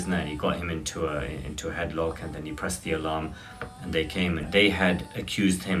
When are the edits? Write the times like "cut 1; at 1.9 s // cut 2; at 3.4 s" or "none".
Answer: cut 1; at 4.5 s